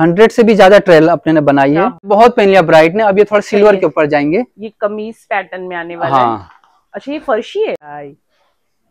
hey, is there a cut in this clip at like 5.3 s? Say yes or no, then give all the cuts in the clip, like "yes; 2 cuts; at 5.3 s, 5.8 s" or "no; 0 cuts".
no; 2 cuts; at 2.1 s, 7.9 s